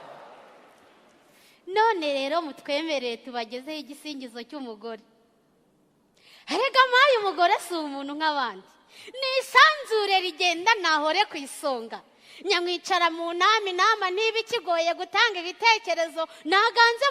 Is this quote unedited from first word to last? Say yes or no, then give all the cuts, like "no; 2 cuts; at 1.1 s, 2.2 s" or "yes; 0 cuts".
yes; 0 cuts